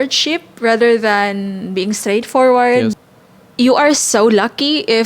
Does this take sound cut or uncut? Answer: cut